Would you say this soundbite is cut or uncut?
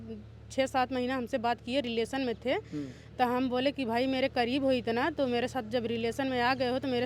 uncut